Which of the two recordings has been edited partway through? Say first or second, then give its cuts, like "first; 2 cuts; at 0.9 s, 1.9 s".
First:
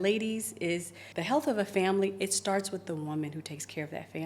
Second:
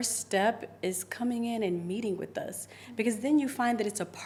first; 1 cut; at 1.0 s